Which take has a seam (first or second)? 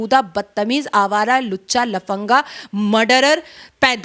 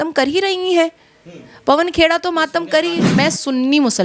second